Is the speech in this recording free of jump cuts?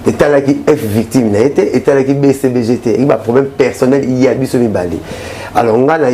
yes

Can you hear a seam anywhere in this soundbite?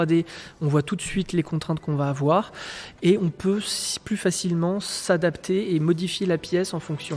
no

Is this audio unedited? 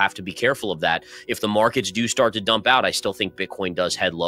yes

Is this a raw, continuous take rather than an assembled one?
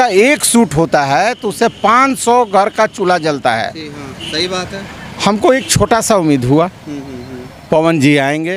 yes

